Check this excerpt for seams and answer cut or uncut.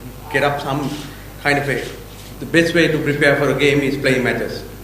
cut